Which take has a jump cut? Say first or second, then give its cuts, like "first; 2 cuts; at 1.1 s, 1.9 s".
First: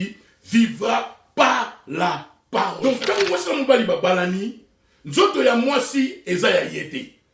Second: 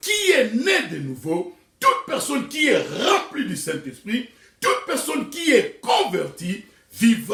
first; 1 cut; at 2.8 s